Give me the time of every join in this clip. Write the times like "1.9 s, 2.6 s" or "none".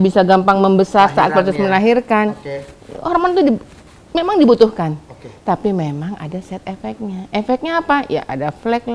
none